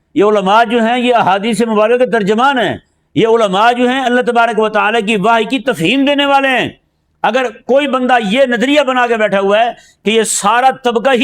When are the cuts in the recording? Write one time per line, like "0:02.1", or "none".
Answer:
none